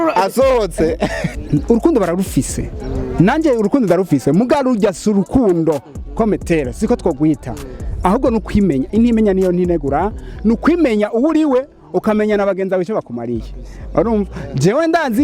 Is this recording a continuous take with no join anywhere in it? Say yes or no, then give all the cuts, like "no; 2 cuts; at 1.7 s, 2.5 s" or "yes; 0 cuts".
no; 1 cut; at 1.2 s